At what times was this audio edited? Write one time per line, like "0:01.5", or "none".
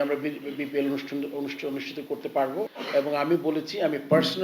0:02.7